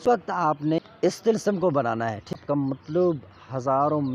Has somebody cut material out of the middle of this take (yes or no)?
yes